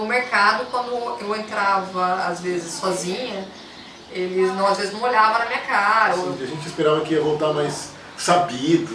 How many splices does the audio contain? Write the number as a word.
one